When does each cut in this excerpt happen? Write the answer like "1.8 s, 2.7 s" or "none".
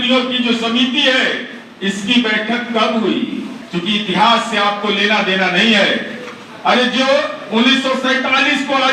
3.6 s